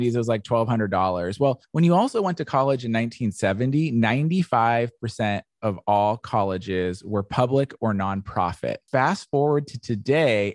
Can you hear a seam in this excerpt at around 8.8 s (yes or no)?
yes